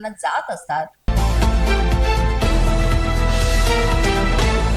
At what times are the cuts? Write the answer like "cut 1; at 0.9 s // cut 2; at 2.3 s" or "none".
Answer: cut 1; at 1.0 s